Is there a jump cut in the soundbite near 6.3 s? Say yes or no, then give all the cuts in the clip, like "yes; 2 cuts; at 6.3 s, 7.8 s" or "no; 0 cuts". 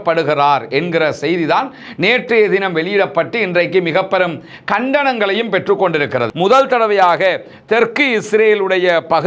yes; 1 cut; at 6.3 s